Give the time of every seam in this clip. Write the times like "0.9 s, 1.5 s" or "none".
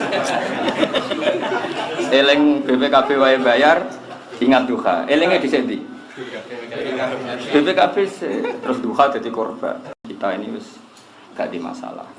10.0 s